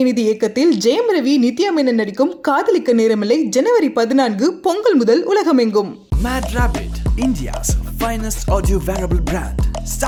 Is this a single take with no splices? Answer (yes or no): yes